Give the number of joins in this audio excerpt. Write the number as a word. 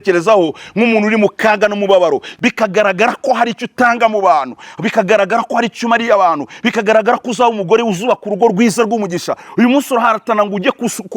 one